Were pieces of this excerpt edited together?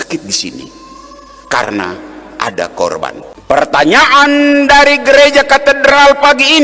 yes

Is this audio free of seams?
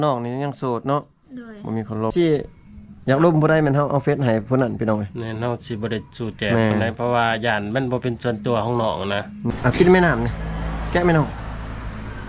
no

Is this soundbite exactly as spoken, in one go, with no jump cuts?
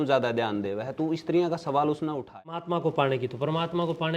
no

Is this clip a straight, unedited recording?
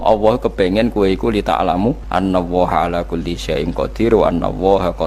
no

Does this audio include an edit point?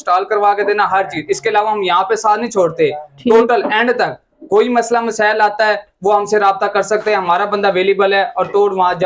no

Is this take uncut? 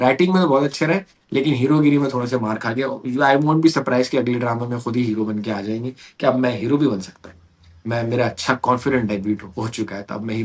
yes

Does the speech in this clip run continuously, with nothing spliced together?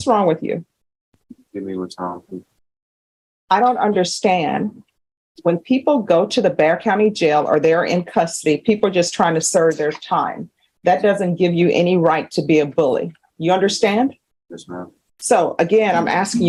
yes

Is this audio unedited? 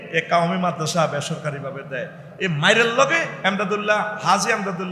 no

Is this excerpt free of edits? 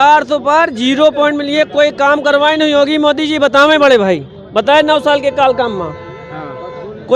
yes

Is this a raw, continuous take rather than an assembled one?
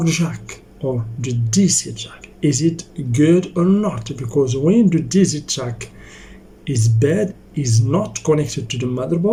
yes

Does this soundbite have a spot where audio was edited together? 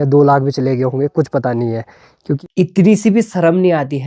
yes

